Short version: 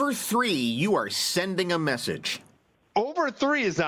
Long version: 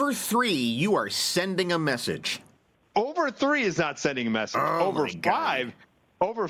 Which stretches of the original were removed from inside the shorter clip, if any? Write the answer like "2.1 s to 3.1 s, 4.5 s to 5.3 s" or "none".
none

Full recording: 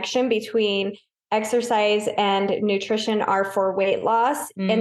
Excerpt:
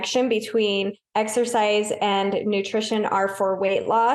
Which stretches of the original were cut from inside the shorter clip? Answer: 1.0 s to 1.2 s

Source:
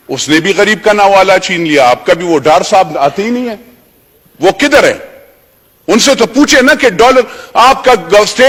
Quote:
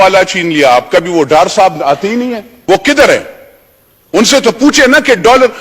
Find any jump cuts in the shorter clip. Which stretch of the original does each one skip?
3.6 s to 4.2 s

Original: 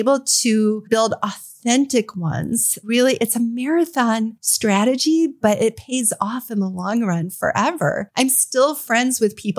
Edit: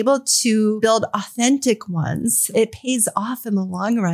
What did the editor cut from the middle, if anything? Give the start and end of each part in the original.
0.9 s to 1.2 s, 2.8 s to 5.6 s

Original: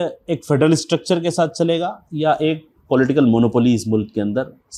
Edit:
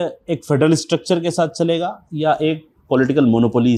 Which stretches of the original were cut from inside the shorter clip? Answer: none

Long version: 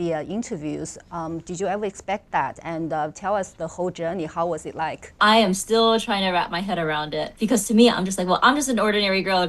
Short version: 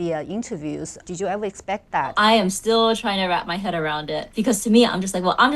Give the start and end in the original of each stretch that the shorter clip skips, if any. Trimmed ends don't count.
1.0 s to 1.4 s, 2.5 s to 5.2 s

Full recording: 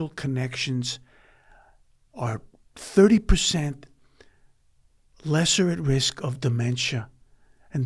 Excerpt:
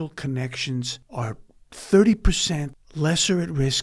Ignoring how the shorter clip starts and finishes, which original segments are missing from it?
1.0 s to 2.0 s, 3.8 s to 5.1 s

